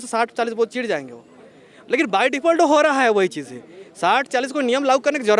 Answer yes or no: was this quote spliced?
no